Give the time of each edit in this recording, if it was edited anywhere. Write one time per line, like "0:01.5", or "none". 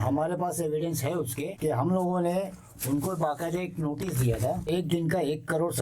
0:01.5
0:04.7